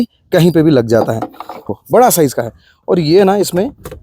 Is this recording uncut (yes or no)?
no